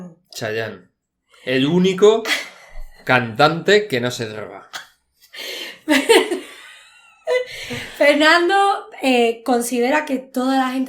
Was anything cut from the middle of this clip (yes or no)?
no